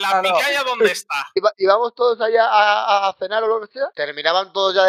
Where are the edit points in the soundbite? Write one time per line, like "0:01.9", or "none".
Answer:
0:01.3
0:04.0